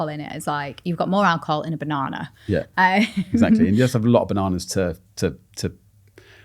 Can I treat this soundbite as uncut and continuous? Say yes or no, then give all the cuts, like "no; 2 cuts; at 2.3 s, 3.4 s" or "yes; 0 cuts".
yes; 0 cuts